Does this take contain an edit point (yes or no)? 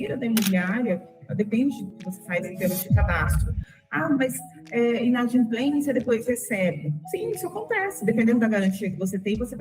yes